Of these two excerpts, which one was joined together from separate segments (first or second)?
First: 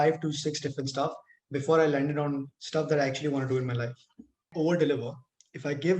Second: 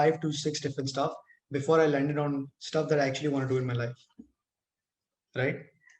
first